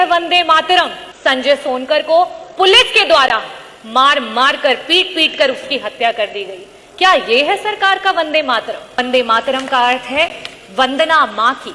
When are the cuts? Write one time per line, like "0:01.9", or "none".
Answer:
0:01.0
0:09.0